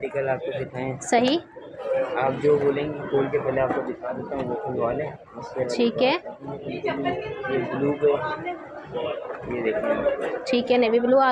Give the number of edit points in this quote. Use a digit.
0